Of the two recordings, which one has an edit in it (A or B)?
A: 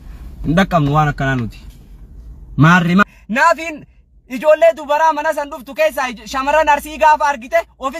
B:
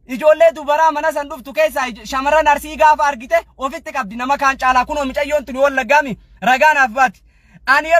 A